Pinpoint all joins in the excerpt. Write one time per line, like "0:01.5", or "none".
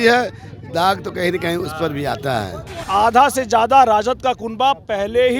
0:02.9